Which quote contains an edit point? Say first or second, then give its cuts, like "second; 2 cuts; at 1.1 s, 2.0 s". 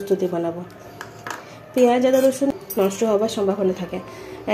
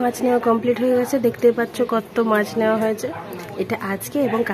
first; 1 cut; at 2.5 s